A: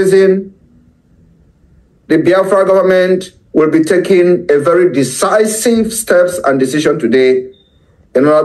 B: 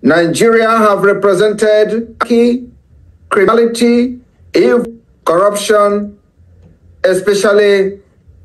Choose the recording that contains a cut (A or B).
B